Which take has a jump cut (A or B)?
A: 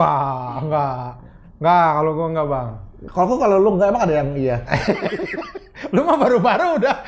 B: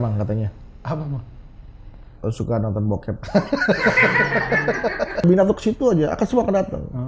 B